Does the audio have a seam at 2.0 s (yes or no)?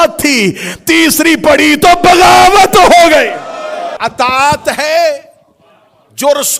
no